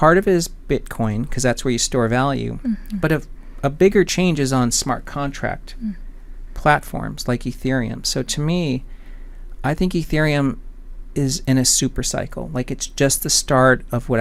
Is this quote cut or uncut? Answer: uncut